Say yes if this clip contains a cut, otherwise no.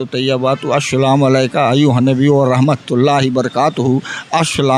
no